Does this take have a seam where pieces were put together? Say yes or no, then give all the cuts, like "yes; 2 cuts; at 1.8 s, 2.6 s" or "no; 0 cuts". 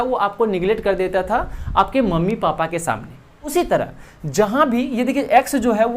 yes; 1 cut; at 3.5 s